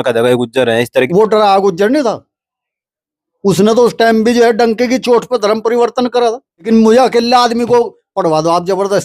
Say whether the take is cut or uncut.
cut